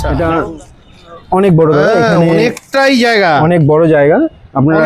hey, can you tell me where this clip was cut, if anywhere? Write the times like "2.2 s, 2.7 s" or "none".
none